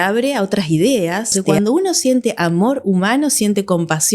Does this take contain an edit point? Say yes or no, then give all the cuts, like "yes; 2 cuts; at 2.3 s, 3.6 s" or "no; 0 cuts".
yes; 1 cut; at 1.4 s